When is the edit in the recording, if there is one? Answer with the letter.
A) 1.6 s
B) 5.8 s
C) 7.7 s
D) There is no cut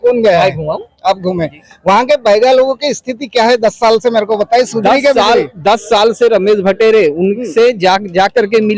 D